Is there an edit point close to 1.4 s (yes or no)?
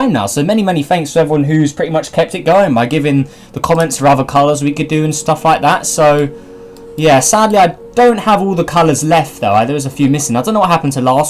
yes